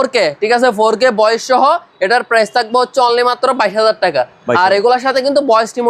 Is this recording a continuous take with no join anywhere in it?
yes; 0 cuts

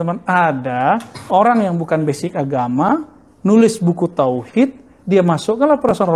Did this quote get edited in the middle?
no; 0 cuts

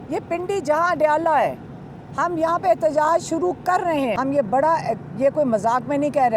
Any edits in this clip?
yes; 1 cut; at 4.1 s

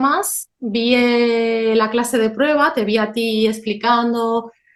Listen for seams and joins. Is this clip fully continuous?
yes; 0 cuts

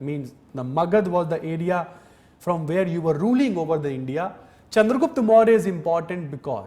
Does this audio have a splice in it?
no; 0 cuts

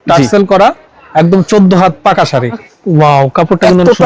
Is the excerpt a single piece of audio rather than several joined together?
no; 1 cut; at 2.6 s

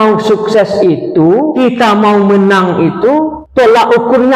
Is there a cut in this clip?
yes; 2 cuts; at 1.5 s, 3.4 s

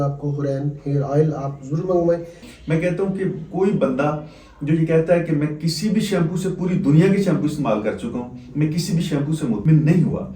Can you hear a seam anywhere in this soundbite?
yes; 1 cut; at 2.4 s

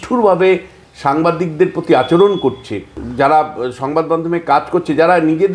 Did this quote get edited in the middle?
yes; 1 cut; at 3.0 s

